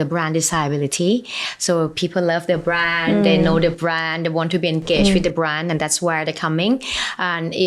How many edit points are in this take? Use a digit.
0